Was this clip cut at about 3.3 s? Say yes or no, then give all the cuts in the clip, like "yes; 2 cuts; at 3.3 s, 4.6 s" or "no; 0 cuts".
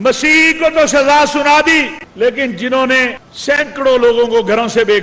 yes; 2 cuts; at 2.0 s, 3.3 s